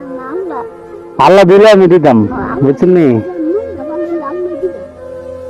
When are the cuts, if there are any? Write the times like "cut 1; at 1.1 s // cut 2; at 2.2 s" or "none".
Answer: none